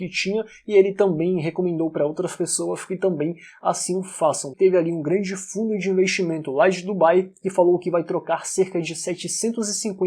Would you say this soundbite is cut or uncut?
cut